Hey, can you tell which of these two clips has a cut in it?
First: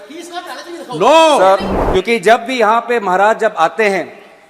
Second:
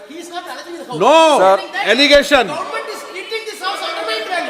first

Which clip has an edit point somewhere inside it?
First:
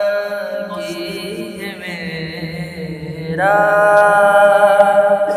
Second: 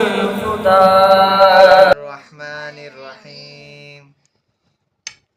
second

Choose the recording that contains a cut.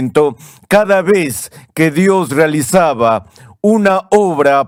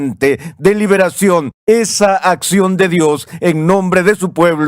second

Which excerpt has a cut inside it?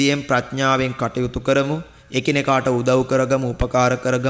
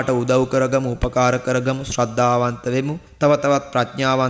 second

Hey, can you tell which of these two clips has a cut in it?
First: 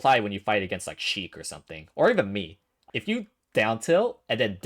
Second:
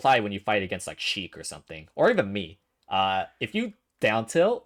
first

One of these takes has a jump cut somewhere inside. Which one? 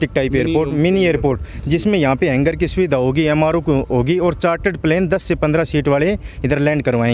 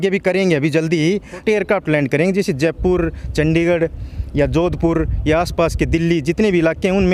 second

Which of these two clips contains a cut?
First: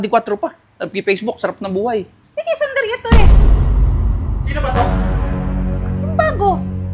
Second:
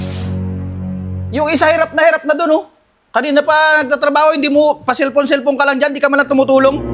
second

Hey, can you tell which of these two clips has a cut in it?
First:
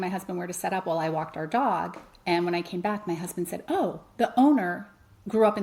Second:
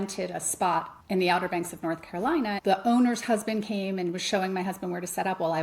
second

